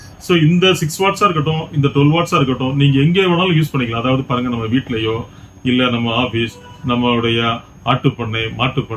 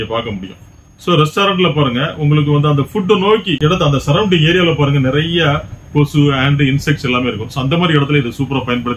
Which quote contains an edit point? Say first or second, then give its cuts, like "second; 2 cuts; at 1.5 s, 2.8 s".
second; 1 cut; at 3.5 s